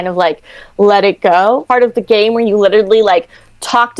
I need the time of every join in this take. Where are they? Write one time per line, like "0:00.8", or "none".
0:01.6